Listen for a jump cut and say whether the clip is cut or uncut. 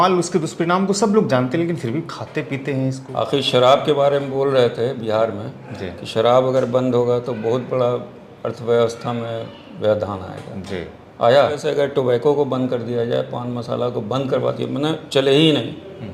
cut